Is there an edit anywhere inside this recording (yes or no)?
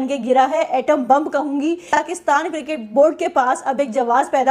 yes